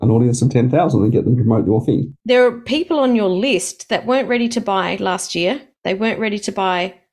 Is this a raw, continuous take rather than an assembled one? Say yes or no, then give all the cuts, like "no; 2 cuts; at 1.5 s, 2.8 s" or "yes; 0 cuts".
no; 1 cut; at 2.1 s